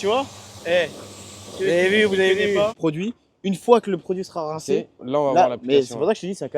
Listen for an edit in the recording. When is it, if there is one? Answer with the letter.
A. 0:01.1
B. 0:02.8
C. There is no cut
B